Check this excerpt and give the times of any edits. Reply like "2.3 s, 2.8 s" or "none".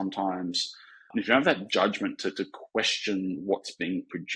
1.1 s